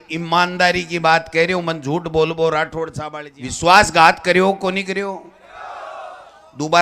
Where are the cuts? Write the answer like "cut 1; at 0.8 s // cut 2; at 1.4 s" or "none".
cut 1; at 3.0 s